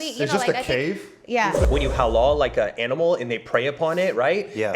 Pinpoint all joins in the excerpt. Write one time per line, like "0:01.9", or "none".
0:01.6